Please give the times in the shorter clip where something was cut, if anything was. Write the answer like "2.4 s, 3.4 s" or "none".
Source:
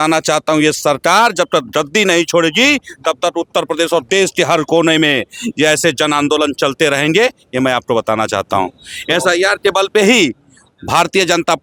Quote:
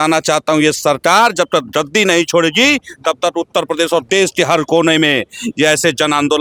none